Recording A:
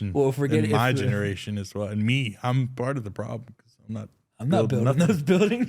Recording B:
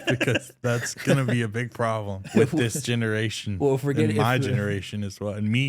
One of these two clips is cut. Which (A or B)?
B